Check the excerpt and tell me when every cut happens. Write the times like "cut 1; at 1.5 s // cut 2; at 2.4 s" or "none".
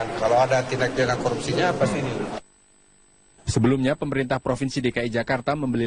cut 1; at 2.9 s